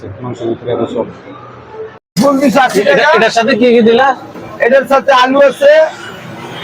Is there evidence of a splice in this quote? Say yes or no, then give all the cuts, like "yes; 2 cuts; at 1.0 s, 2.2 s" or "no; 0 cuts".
yes; 1 cut; at 2.1 s